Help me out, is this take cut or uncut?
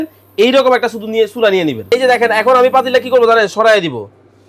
cut